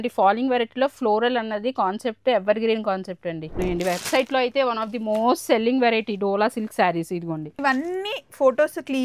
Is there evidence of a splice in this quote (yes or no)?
yes